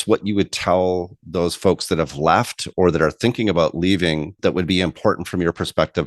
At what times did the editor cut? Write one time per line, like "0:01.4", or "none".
0:04.3

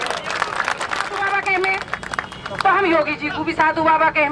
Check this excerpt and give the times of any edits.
0:01.2

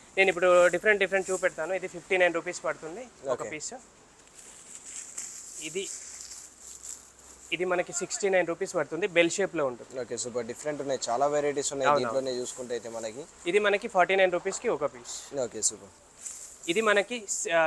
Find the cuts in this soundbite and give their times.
none

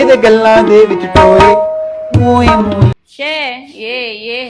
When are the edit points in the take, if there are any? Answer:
0:02.9

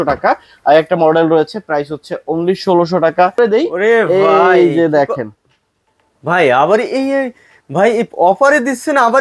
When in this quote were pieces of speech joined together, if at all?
0:03.4

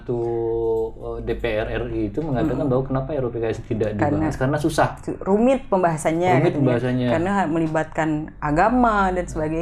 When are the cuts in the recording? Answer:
none

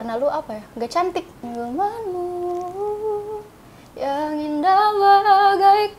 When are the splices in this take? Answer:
0:01.5

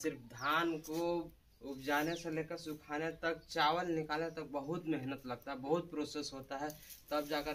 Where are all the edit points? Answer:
none

